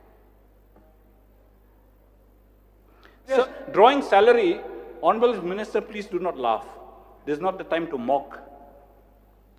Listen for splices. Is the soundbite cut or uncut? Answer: cut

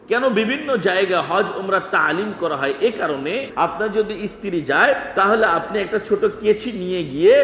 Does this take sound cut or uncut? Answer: cut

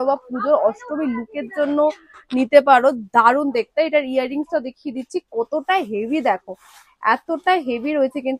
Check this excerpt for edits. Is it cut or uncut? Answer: uncut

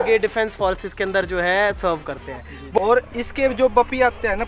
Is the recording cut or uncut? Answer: cut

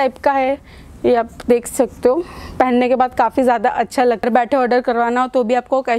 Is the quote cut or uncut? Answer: cut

